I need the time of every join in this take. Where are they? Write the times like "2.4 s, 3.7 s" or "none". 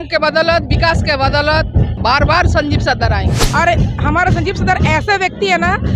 1.9 s, 3.4 s